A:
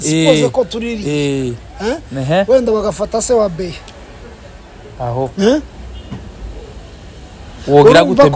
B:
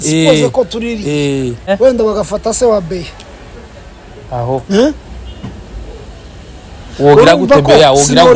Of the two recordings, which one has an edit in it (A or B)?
B